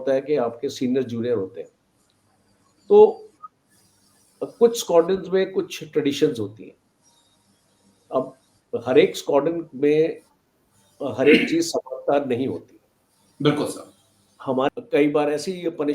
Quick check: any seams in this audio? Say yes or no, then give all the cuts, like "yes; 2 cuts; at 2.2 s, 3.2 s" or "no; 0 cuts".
yes; 1 cut; at 14.7 s